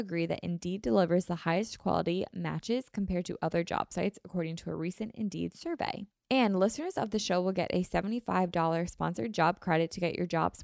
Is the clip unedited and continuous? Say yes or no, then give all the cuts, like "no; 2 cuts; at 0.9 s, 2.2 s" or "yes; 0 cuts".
no; 1 cut; at 6.1 s